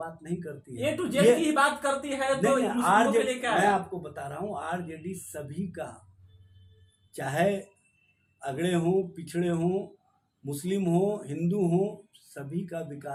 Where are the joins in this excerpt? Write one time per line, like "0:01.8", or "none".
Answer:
none